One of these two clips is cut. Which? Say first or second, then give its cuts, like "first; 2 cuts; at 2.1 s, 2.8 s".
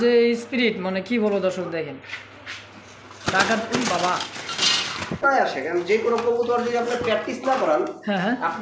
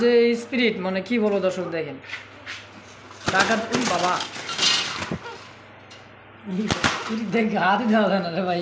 first; 1 cut; at 5.2 s